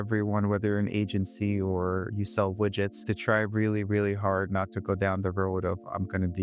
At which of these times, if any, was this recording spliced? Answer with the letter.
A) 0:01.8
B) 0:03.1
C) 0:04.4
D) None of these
B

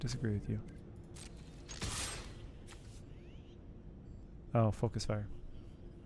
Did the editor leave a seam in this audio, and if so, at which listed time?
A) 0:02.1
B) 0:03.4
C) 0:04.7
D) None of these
D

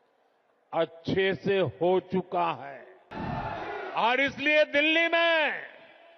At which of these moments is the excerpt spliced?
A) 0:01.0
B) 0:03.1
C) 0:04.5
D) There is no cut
B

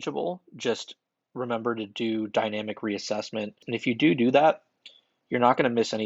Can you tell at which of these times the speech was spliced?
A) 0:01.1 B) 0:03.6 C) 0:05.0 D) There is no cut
B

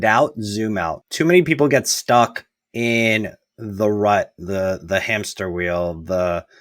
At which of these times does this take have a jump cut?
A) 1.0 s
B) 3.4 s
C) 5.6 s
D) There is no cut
A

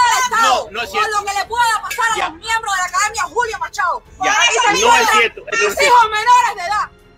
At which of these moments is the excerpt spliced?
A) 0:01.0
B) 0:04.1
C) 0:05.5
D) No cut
D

